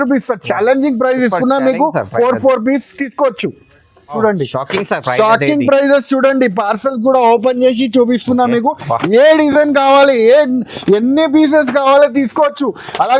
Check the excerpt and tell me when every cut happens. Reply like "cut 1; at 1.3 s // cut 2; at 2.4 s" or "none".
cut 1; at 4.1 s